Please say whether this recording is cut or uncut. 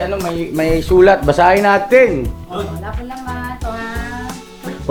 uncut